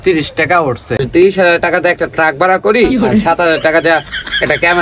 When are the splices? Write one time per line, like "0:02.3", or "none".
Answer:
0:01.0